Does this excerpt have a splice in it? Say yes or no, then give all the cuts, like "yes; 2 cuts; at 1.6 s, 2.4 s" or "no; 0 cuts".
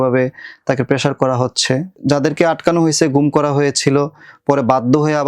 yes; 1 cut; at 1.9 s